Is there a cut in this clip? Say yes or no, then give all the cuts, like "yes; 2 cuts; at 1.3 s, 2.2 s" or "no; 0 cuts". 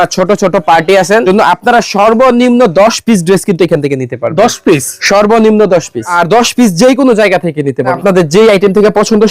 yes; 3 cuts; at 1.2 s, 6.1 s, 8.0 s